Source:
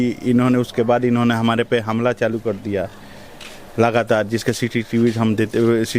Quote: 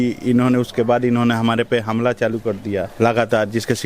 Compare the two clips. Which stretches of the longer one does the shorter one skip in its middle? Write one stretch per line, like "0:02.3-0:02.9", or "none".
0:02.9-0:03.7